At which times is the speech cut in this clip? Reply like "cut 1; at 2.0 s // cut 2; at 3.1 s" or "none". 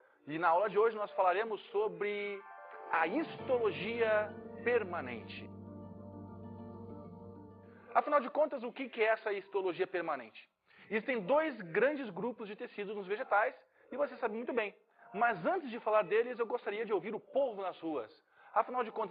none